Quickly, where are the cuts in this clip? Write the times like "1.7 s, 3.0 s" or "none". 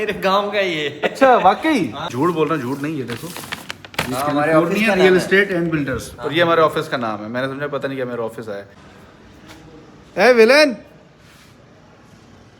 2.1 s, 8.8 s